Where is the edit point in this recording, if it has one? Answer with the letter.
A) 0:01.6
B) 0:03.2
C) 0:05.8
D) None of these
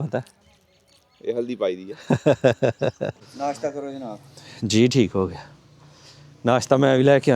B